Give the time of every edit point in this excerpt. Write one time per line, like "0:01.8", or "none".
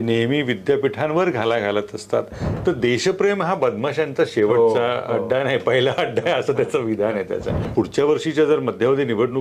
0:02.4
0:07.6

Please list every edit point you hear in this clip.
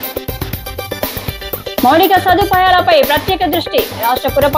0:01.1

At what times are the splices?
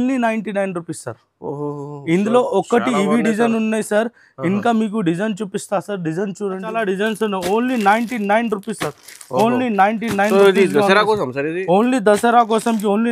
0:06.7

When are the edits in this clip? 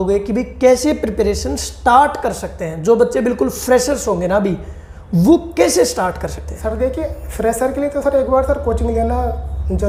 none

